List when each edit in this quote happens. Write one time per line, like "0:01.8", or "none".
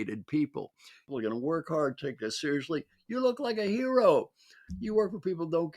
0:01.1